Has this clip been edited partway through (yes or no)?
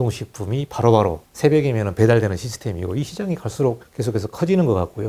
yes